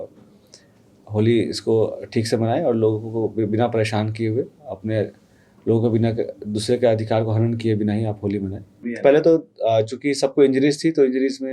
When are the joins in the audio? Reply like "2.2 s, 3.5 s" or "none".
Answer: 8.7 s